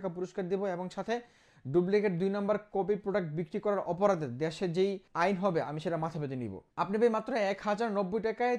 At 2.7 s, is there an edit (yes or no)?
no